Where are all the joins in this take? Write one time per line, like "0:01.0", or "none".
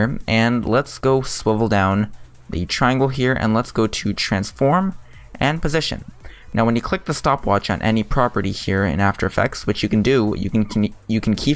none

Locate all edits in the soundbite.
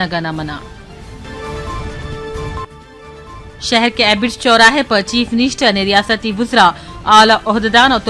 none

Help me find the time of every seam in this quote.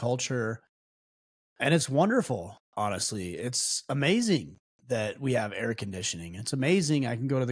0:02.6

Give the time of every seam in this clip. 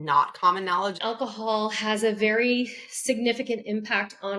0:01.0

